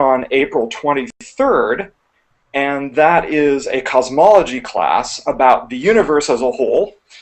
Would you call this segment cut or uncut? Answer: cut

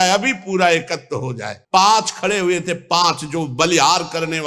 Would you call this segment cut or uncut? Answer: cut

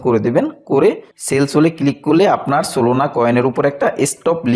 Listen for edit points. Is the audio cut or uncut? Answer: uncut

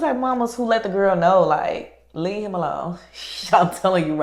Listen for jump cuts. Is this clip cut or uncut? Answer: uncut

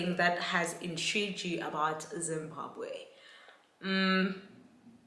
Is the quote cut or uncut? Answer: uncut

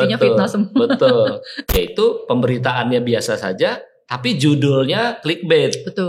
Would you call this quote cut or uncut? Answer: cut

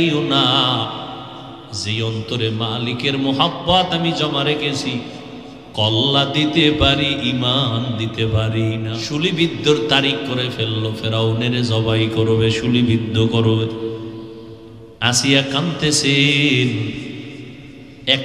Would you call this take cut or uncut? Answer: cut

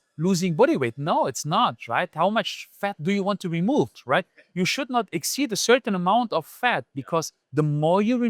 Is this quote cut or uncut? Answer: uncut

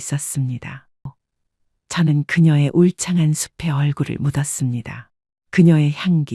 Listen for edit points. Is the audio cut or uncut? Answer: cut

